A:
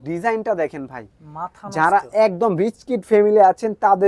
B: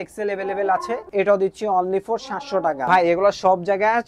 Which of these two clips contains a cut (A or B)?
B